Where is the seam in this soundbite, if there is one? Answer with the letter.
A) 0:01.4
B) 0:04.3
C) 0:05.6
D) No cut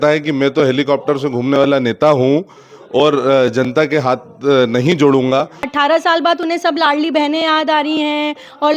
C